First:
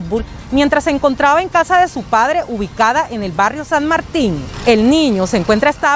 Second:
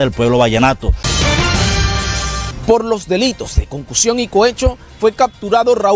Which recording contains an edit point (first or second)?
second